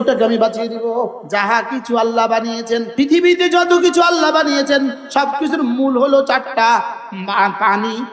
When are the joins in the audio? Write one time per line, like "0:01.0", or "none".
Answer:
0:01.2
0:02.9